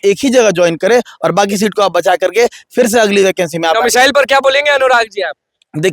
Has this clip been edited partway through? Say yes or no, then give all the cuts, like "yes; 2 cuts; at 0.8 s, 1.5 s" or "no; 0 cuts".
no; 0 cuts